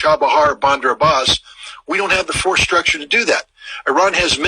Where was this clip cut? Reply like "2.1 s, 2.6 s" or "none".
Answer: 2.0 s